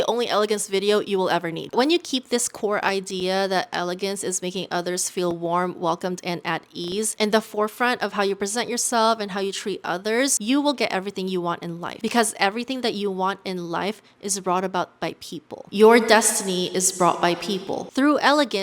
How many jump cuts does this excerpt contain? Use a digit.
1